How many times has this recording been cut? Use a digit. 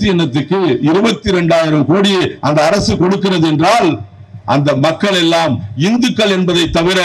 0